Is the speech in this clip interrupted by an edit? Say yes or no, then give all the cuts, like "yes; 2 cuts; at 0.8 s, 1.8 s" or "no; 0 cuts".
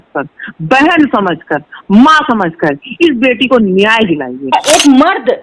yes; 1 cut; at 4.5 s